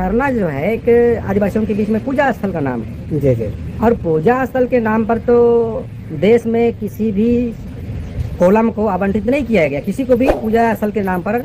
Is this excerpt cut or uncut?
uncut